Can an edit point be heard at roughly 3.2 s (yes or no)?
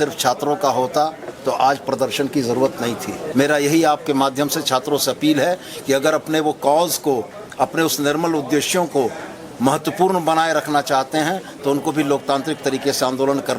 yes